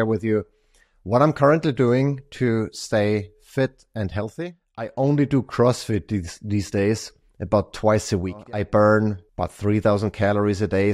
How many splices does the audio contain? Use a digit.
3